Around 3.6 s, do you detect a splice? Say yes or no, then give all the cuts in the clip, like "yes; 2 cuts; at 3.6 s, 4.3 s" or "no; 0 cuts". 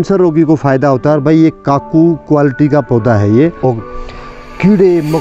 yes; 1 cut; at 3.6 s